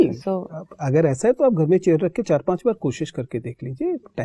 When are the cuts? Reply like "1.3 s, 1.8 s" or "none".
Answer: none